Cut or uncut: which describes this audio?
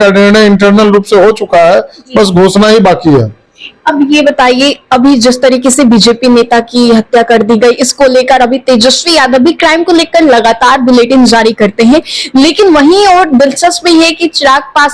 uncut